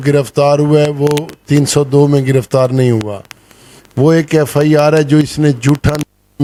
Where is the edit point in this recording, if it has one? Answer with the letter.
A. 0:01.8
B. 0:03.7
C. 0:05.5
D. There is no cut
D